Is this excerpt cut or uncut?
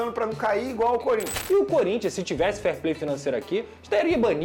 cut